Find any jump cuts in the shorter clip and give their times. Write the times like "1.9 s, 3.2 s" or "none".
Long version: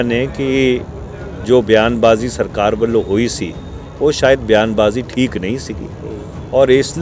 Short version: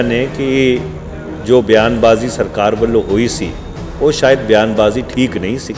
none